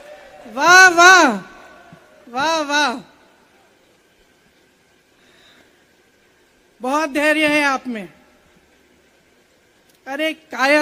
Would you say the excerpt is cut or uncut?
uncut